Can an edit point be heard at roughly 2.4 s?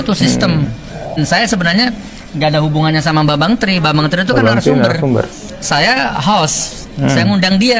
no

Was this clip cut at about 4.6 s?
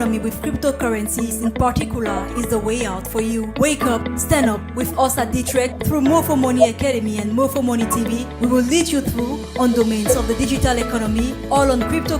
no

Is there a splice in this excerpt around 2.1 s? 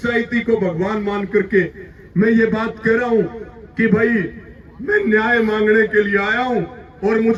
no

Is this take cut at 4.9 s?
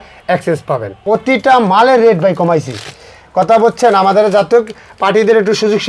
no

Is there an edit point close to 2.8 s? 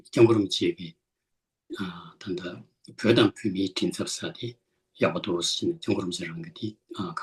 no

